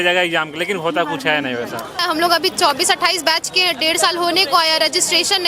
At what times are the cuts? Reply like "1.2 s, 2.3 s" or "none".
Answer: 2.0 s